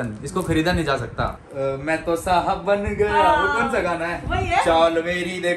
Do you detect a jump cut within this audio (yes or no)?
yes